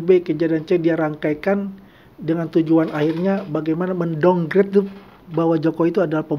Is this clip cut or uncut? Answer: uncut